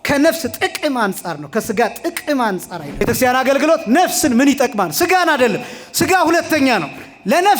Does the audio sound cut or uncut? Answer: cut